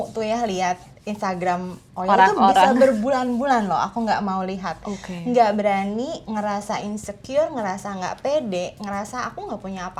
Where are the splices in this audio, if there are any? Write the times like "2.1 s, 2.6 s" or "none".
none